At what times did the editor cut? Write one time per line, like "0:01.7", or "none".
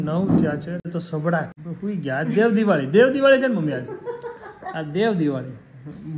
0:00.8
0:01.6